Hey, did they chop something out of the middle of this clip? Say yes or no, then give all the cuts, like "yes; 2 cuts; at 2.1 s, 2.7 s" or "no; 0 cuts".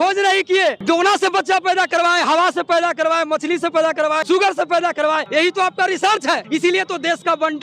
yes; 4 cuts; at 0.8 s, 4.2 s, 5.2 s, 6.4 s